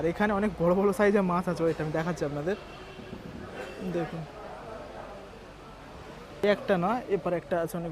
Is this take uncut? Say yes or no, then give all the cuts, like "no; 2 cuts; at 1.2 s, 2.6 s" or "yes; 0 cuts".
no; 1 cut; at 6.4 s